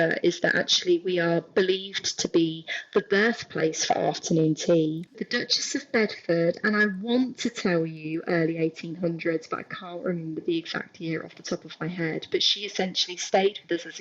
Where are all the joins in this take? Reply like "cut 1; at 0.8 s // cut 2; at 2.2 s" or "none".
cut 1; at 5.1 s